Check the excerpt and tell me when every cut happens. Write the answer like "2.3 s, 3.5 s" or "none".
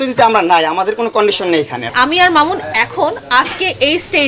1.9 s